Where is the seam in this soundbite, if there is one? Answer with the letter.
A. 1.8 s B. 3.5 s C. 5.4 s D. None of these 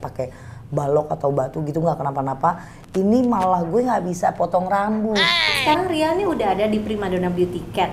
C